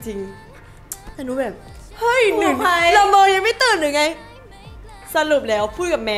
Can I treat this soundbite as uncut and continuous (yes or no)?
yes